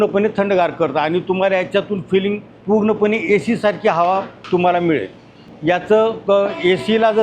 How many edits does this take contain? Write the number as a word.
three